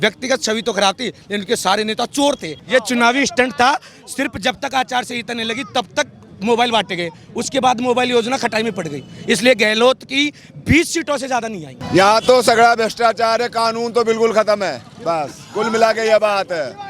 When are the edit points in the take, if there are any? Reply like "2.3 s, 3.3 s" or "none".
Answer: 2.5 s, 11.7 s